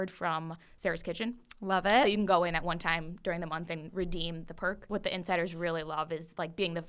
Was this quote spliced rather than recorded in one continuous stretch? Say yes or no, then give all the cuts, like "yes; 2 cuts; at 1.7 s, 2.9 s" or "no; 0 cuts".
yes; 1 cut; at 4.8 s